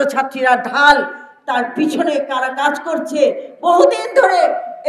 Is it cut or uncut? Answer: uncut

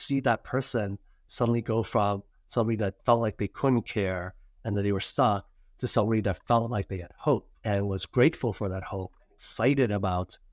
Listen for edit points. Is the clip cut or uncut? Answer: uncut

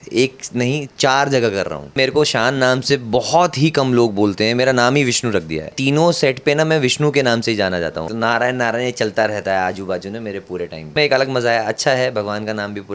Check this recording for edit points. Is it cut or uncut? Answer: cut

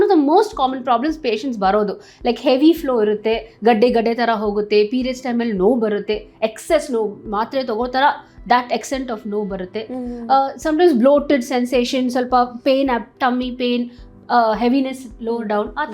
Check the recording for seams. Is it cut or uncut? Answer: uncut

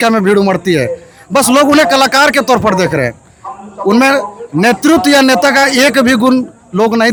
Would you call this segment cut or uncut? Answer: uncut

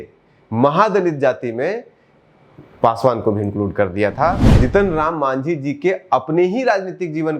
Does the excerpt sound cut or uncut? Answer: cut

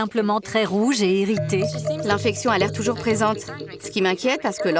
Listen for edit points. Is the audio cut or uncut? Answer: cut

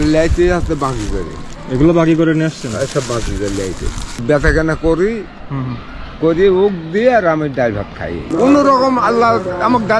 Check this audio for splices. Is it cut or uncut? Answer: cut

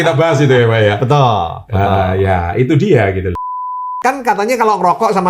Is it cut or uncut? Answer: cut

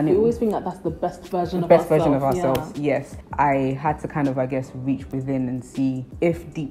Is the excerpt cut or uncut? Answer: cut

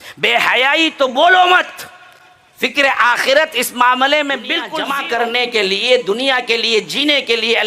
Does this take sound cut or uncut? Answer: cut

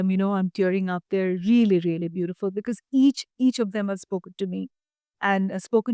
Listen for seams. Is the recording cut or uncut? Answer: uncut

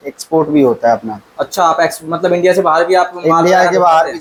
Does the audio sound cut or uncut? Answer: uncut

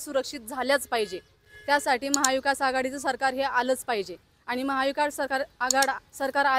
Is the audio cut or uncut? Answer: uncut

